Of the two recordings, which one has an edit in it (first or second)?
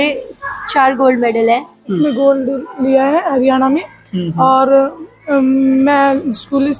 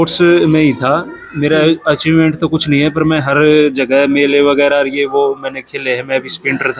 first